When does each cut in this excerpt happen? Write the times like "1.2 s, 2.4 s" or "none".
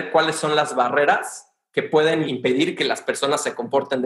2.3 s

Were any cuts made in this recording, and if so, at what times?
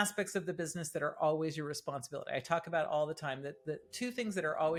none

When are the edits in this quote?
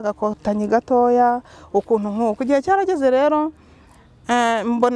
none

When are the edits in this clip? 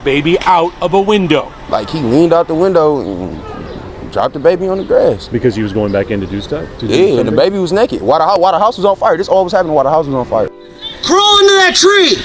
10.5 s

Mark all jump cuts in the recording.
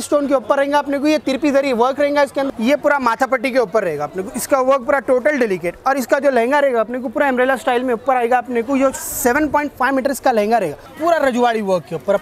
2.4 s, 10.8 s

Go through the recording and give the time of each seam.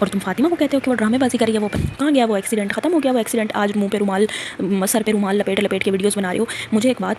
1.7 s

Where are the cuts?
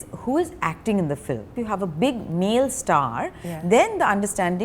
1.5 s

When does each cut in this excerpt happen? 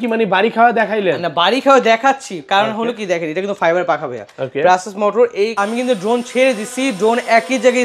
5.6 s

